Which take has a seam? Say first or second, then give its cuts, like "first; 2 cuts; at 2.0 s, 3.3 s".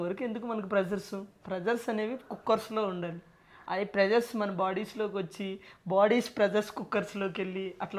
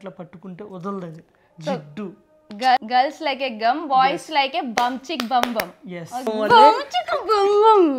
second; 2 cuts; at 2.8 s, 6.3 s